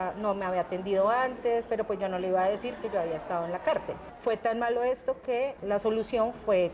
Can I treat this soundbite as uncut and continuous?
no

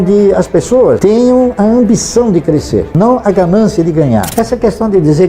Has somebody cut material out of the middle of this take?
yes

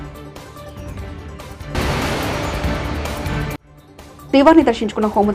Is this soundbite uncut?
yes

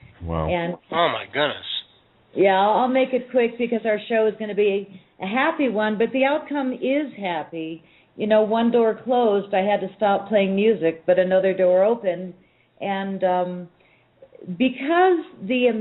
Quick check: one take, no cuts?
yes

